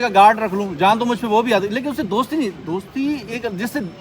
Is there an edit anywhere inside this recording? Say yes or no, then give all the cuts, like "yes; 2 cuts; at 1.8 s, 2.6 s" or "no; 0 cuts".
no; 0 cuts